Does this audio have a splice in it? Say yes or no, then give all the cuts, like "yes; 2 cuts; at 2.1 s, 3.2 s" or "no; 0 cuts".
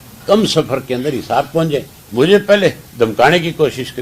yes; 1 cut; at 2.0 s